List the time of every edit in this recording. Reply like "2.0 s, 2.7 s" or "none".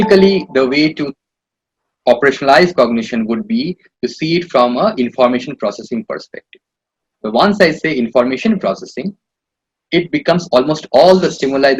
none